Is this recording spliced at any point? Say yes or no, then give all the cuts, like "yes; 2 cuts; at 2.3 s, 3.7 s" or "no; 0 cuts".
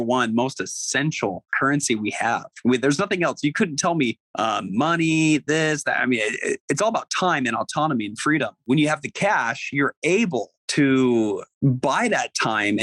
yes; 5 cuts; at 1.5 s, 4.2 s, 8.6 s, 10.6 s, 11.5 s